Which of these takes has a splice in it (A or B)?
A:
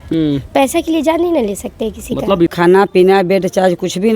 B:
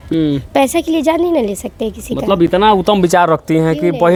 A